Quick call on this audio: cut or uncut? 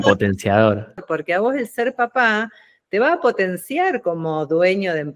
cut